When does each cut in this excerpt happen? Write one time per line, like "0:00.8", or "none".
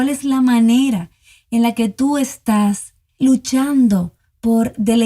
0:03.2